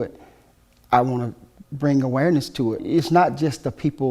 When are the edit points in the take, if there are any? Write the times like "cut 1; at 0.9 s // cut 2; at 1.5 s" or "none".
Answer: cut 1; at 2.8 s